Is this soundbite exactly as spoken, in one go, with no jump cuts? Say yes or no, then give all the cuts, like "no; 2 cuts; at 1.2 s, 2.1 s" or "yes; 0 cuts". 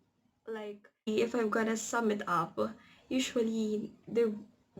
no; 1 cut; at 1.1 s